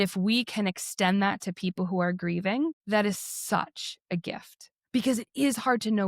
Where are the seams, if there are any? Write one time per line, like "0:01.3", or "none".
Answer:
0:02.8